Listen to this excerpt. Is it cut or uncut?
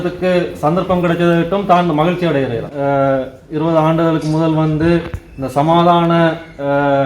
cut